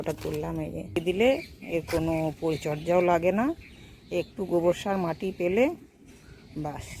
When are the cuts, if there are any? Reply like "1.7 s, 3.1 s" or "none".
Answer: 1.0 s